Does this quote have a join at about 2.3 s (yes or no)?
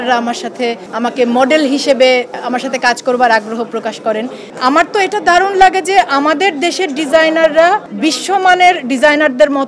no